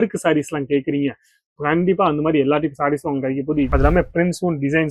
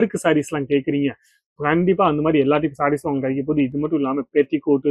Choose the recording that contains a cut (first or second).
first